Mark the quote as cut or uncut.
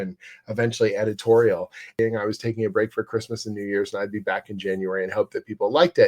cut